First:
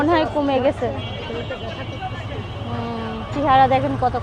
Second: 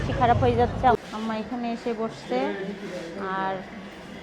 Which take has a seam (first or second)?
second